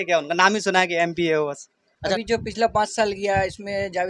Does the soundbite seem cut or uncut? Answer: cut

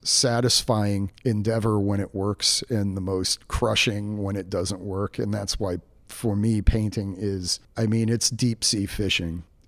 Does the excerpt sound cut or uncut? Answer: cut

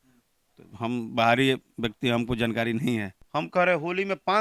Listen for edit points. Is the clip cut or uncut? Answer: cut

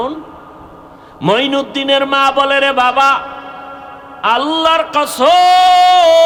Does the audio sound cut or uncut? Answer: uncut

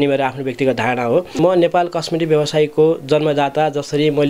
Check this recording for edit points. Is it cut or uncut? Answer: cut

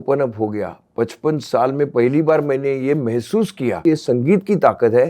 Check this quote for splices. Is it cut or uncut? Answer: cut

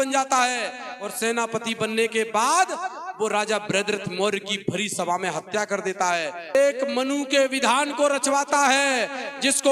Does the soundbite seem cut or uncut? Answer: cut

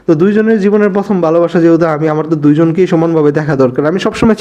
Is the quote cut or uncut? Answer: uncut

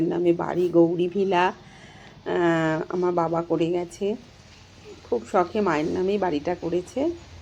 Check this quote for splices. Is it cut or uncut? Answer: uncut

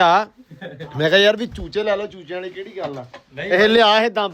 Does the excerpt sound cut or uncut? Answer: uncut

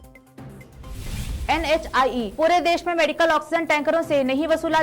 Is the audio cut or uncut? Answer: cut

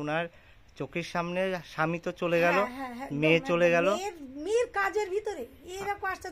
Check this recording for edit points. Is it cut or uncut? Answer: uncut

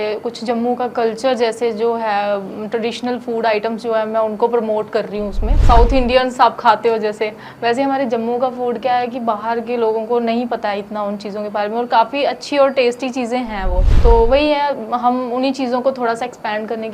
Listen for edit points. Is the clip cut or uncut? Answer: cut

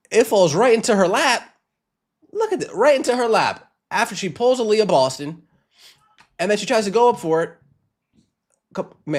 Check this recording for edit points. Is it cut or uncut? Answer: uncut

